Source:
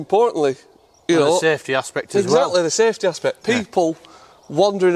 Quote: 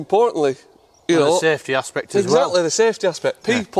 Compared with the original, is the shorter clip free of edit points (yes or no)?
yes